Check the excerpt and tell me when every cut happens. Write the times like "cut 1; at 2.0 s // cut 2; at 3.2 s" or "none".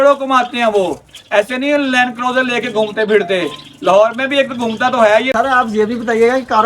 cut 1; at 5.3 s